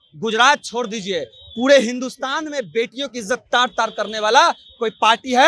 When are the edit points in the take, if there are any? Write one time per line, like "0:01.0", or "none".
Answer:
none